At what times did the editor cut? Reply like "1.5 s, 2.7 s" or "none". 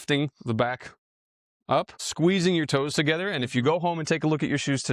2.0 s